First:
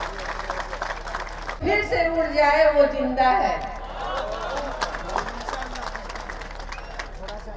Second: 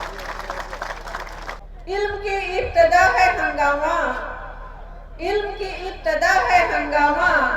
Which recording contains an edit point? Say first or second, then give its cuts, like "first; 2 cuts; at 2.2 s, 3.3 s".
second; 1 cut; at 1.6 s